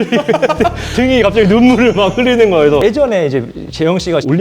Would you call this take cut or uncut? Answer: cut